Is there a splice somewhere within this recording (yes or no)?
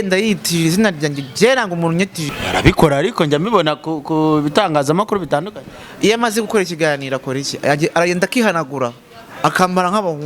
yes